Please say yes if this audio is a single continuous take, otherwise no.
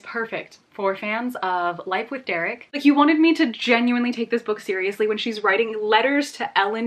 no